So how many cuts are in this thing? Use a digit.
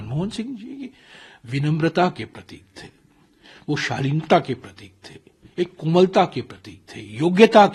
0